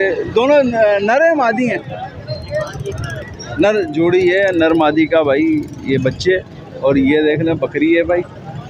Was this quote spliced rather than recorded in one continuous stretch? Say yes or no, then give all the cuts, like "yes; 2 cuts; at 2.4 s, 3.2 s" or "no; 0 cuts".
no; 0 cuts